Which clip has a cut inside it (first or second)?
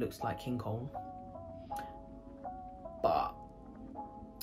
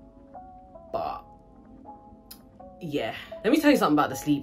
second